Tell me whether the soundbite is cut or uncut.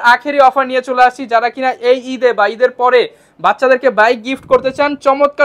uncut